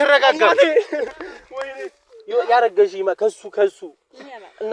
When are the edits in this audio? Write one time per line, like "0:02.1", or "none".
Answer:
0:02.1